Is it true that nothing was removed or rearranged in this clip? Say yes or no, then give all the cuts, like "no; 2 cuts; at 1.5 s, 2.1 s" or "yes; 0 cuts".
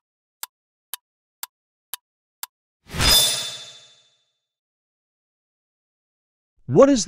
no; 1 cut; at 2.6 s